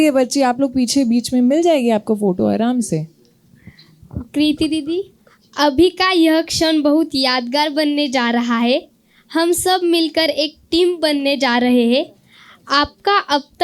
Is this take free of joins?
yes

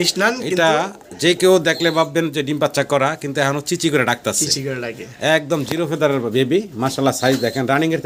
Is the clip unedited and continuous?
yes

